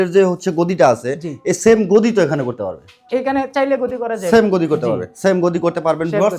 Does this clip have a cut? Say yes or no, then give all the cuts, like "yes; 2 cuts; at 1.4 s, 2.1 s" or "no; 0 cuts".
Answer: no; 0 cuts